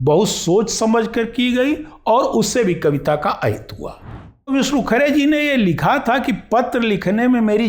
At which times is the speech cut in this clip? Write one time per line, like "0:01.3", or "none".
0:04.5